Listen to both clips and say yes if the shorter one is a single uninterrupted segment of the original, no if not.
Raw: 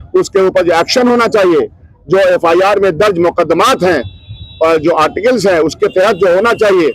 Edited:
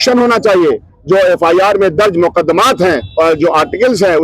no